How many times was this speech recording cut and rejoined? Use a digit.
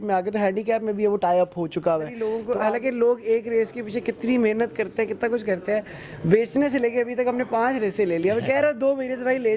1